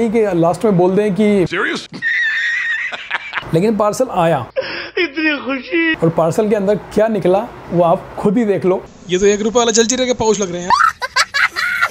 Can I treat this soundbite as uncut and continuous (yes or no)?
no